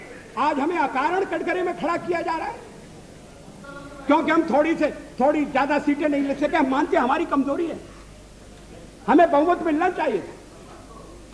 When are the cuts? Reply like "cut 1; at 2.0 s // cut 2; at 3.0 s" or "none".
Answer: none